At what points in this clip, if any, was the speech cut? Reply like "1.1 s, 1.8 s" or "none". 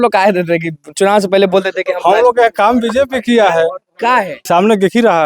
4.4 s